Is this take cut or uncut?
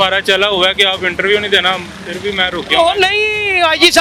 uncut